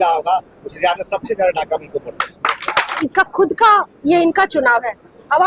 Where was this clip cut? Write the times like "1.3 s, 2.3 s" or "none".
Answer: 3.0 s